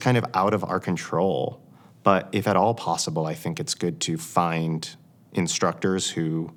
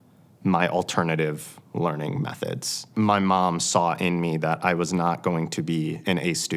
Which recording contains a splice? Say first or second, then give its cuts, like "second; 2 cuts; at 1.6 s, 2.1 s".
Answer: second; 1 cut; at 2.8 s